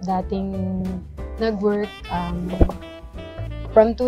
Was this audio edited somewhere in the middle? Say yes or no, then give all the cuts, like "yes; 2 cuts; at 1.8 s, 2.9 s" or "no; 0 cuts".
no; 0 cuts